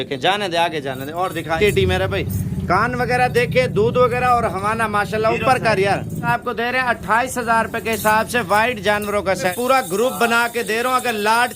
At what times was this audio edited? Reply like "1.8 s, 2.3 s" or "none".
1.6 s, 6.3 s, 9.5 s